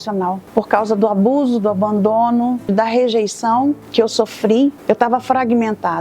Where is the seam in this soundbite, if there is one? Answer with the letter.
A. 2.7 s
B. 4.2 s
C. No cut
A